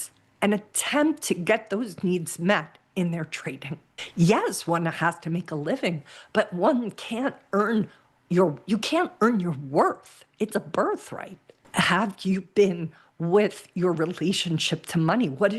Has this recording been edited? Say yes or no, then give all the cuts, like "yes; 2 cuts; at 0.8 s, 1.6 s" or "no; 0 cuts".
yes; 2 cuts; at 4.0 s, 11.6 s